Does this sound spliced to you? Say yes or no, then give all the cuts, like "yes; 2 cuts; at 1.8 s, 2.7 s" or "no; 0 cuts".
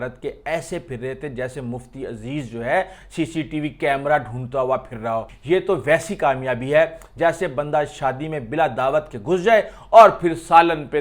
yes; 1 cut; at 5.3 s